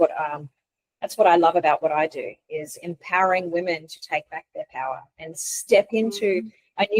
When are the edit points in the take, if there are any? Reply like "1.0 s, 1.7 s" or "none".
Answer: none